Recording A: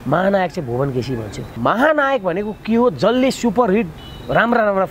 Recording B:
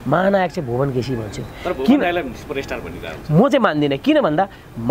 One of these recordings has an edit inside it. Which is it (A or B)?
A